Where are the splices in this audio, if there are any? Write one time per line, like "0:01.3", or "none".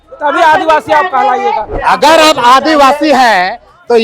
0:01.7